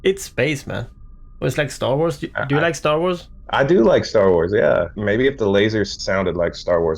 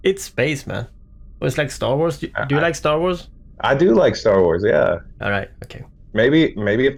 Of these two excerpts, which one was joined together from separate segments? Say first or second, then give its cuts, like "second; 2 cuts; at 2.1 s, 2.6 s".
first; 3 cuts; at 3.3 s, 5.0 s, 5.9 s